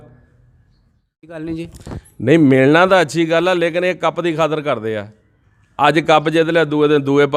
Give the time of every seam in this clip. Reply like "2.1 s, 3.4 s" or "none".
1.3 s